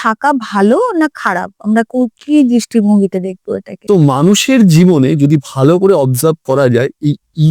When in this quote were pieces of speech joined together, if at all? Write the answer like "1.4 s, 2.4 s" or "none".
3.7 s

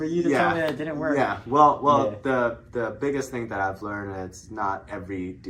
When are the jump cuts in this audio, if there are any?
none

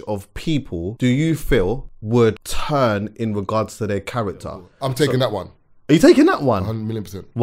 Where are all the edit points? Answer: 0.9 s, 1.9 s, 2.5 s, 4.6 s

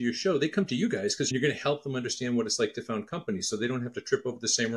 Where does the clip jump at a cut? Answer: 1.3 s

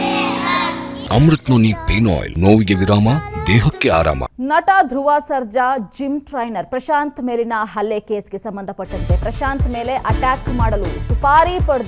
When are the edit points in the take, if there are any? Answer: 1.0 s, 2.3 s, 4.2 s

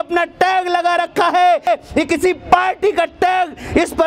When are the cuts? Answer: 1.7 s

